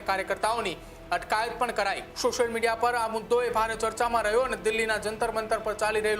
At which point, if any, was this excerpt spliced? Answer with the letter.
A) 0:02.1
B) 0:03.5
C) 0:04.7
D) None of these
A